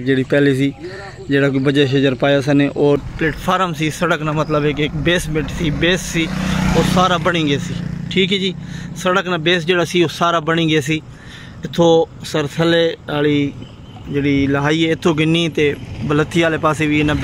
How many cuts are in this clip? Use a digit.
1